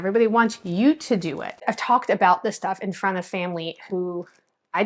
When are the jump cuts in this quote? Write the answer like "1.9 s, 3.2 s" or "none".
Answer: 1.6 s